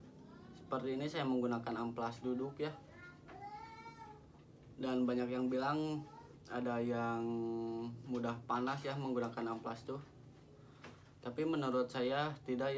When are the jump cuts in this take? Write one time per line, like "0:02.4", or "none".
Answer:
none